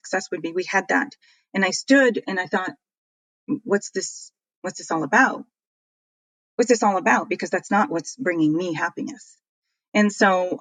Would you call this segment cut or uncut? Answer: uncut